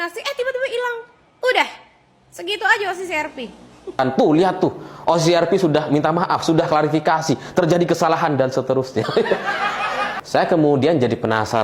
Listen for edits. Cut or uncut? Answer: cut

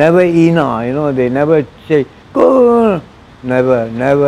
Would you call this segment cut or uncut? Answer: uncut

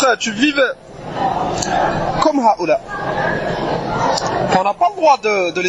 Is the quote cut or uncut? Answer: uncut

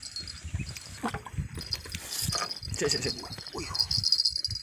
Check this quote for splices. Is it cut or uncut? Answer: cut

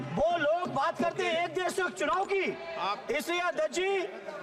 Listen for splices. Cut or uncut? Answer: uncut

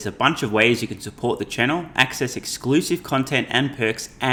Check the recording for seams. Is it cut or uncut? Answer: uncut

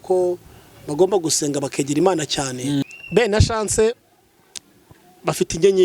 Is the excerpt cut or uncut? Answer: cut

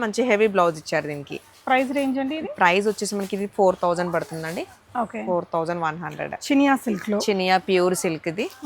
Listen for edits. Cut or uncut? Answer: uncut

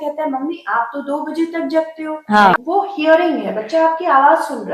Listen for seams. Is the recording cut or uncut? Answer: cut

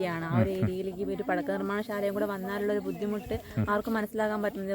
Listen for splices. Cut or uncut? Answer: uncut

